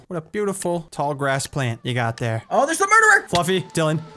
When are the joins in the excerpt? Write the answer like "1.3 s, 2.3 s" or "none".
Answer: 2.4 s